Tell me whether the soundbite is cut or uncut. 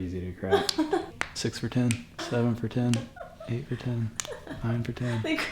cut